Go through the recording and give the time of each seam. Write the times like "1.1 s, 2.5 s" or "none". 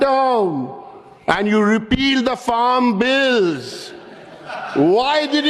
none